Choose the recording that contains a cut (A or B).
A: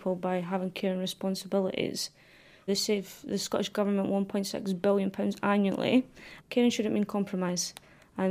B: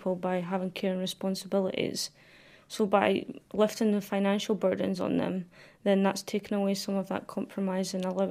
A